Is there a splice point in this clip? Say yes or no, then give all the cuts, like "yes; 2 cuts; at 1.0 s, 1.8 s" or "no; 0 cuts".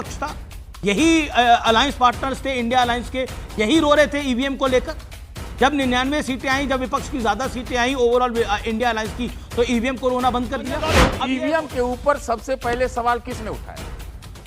yes; 1 cut; at 11.1 s